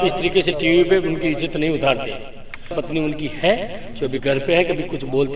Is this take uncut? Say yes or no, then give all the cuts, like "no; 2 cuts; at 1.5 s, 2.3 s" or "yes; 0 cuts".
no; 1 cut; at 2.8 s